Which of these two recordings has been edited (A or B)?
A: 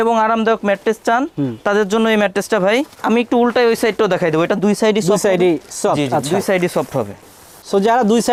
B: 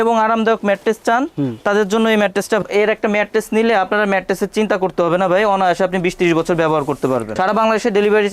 B